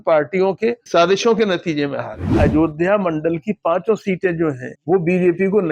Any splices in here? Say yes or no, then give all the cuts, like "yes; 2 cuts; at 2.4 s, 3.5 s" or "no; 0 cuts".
yes; 2 cuts; at 2.4 s, 4.7 s